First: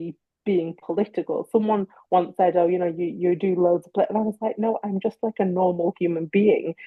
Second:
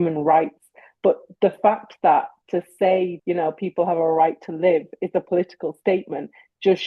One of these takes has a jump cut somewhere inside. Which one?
second; 1 cut; at 3.2 s

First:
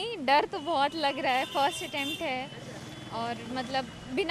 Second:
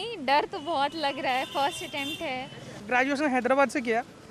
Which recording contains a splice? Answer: second; 1 cut; at 2.9 s

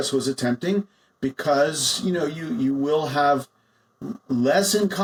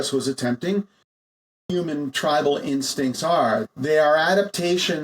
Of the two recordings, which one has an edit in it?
second; 2 cuts; at 1.5 s, 3.6 s

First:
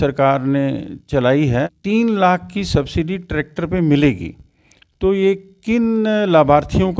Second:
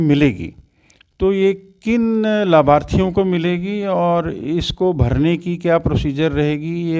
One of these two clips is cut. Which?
first; 1 cut; at 1.7 s

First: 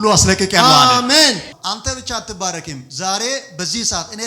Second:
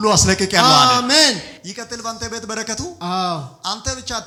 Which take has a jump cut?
first; 1 cut; at 1.5 s

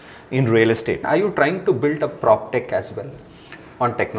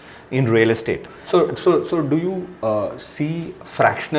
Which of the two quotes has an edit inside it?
first; 1 cut; at 1.0 s

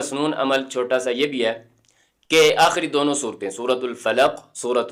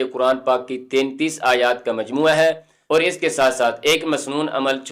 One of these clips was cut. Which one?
second; 1 cut; at 2.7 s

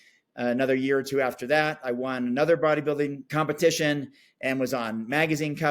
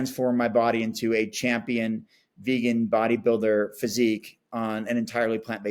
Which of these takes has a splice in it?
first; 1 cut; at 3.2 s

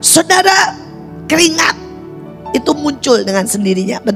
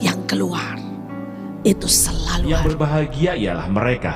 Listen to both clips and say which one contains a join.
second; 1 cut; at 2.5 s

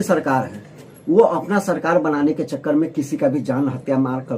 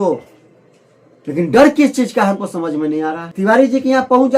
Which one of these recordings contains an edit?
second; 1 cut; at 3.3 s

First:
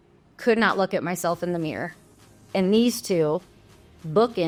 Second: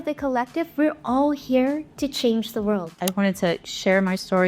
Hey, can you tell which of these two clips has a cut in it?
second; 1 cut; at 3.0 s

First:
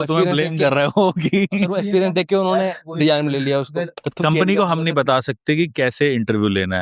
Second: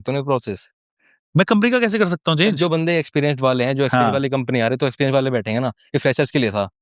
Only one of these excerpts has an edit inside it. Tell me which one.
first; 1 cut; at 4.0 s

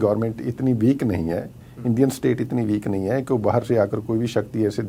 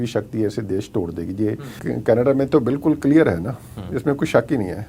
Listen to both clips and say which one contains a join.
second; 1 cut; at 1.8 s

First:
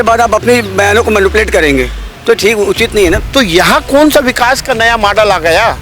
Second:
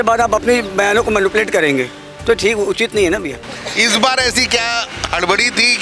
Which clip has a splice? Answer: first; 1 cut; at 3.2 s

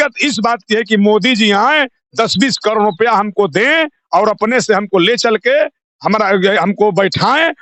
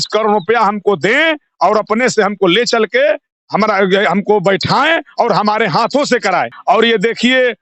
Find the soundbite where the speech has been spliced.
second; 1 cut; at 6.5 s

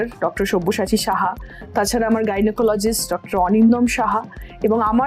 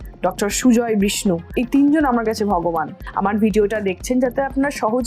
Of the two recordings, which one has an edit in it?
second; 2 cuts; at 1.5 s, 3.0 s

